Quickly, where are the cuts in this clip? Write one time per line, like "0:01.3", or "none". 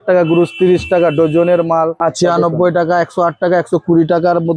0:01.9